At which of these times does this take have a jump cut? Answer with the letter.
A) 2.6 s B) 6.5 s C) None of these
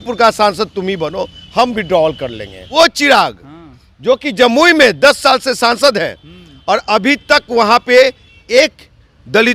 A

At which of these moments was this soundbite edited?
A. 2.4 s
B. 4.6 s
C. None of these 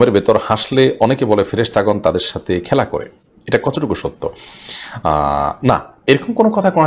C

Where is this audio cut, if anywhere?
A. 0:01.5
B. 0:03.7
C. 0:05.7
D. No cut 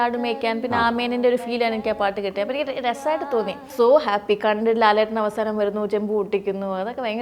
B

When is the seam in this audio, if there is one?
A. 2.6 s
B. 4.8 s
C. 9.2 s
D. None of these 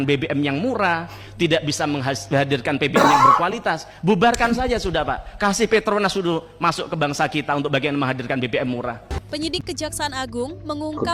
C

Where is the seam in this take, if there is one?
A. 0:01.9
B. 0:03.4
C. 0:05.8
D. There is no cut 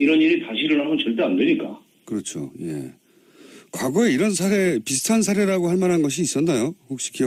D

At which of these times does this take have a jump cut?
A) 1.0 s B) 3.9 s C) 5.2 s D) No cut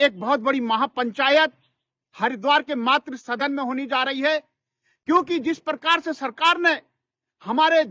D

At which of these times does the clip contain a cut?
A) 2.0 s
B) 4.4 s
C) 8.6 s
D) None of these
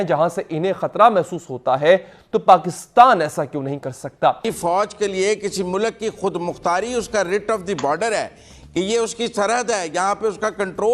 B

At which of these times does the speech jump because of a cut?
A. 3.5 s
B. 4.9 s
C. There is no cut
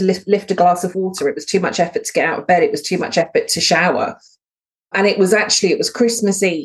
B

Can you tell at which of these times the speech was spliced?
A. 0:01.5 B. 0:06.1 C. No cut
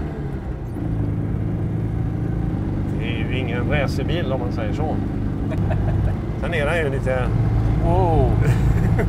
B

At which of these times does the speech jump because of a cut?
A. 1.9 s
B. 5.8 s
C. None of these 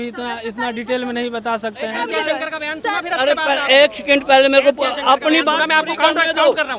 A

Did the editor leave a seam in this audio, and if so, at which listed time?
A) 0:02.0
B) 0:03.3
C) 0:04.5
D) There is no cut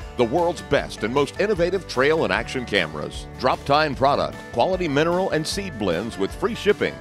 B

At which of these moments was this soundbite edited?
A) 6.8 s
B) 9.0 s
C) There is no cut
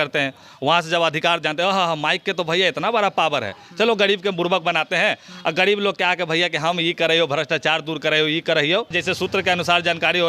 B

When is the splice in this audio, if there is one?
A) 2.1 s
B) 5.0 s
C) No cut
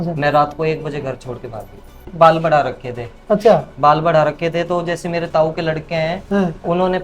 A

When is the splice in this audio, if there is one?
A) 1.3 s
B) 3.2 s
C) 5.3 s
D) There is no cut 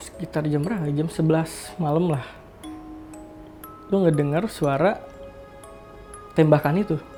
D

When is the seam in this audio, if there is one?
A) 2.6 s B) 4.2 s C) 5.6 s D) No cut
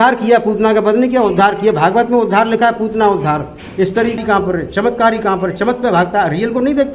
B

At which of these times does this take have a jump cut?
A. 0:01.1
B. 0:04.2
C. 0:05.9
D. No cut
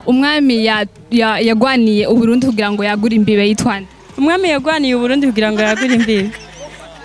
D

